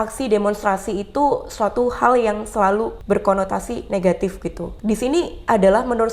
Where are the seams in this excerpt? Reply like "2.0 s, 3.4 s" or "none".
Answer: 3.0 s, 4.7 s